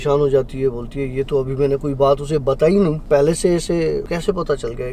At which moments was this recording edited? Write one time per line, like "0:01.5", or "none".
0:03.0
0:04.1